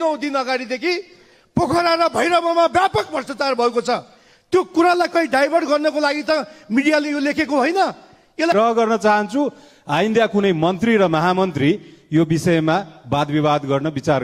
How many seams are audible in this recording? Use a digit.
1